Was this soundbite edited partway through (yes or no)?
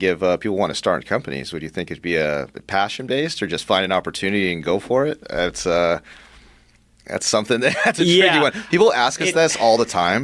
no